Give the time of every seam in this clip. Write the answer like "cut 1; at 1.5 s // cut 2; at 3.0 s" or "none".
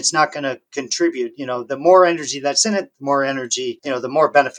none